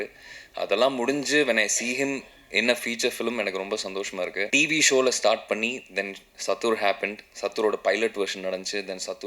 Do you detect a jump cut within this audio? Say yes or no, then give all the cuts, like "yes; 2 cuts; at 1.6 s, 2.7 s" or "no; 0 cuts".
yes; 1 cut; at 4.5 s